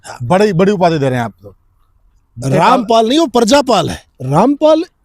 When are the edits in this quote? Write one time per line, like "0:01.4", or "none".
0:04.0

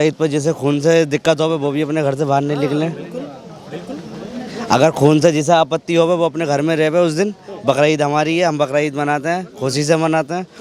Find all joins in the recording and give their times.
none

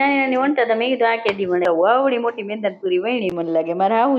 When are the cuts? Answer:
0:01.6
0:03.2

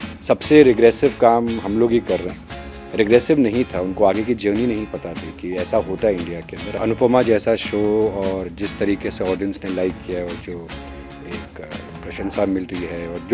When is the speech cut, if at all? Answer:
0:06.8

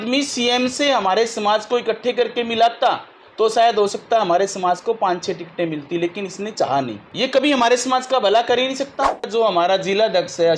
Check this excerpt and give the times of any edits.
0:07.0
0:09.3

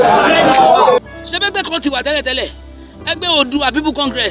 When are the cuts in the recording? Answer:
0:01.0

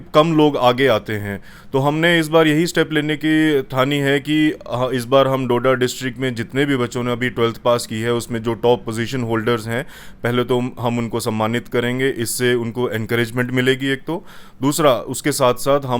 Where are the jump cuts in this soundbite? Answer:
none

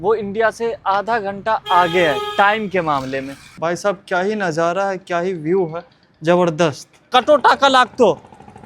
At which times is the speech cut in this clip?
0:03.6
0:07.1

